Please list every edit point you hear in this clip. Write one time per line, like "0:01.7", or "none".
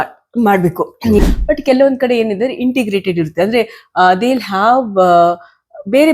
0:01.2